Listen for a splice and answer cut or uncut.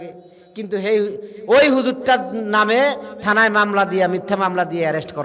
uncut